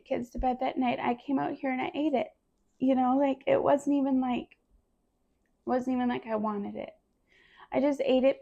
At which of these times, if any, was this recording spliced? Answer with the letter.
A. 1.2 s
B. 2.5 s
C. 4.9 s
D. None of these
D